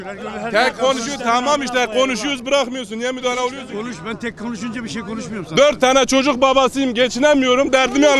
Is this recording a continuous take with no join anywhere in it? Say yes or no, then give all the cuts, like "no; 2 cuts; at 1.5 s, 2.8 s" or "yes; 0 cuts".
no; 1 cut; at 3.7 s